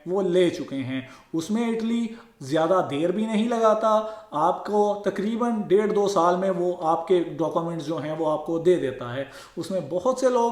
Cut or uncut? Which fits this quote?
uncut